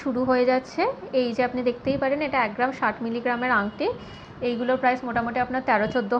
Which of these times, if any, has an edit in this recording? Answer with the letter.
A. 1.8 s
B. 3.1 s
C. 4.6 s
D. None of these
D